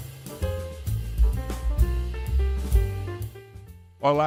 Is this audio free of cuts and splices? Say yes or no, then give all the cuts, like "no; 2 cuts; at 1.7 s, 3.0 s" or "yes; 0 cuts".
yes; 0 cuts